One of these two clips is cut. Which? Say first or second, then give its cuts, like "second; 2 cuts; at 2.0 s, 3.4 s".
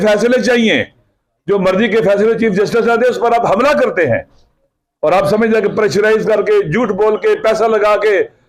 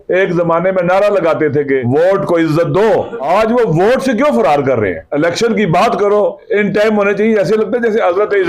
second; 4 cuts; at 1.8 s, 3.2 s, 5.0 s, 6.4 s